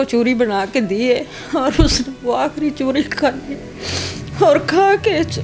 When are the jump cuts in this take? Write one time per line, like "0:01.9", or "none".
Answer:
none